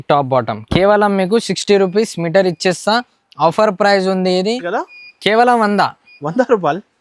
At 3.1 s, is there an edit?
no; 1 cut; at 4.7 s

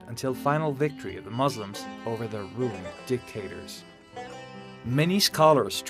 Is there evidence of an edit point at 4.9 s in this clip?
yes; 1 cut; at 4.9 s

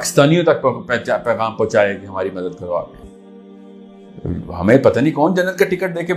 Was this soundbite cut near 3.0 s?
yes; 1 cut; at 3.0 s

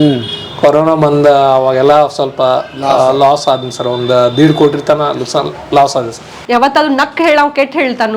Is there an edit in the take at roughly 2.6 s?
no; 1 cut; at 6.3 s

